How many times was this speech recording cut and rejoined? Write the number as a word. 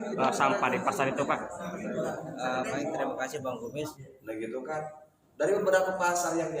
one